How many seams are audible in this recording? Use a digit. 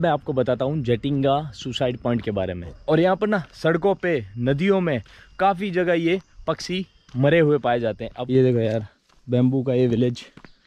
2